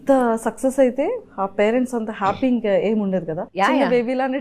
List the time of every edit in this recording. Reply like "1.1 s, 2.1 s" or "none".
3.4 s